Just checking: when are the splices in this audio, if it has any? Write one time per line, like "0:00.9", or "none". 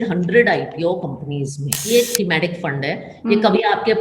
0:01.8